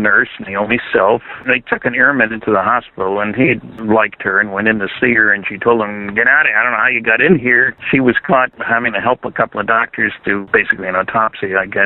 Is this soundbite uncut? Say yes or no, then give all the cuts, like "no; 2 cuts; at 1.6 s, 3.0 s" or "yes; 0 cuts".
yes; 0 cuts